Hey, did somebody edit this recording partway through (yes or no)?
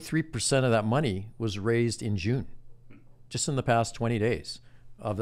no